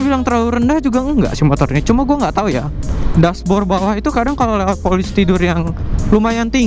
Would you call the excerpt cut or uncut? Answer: uncut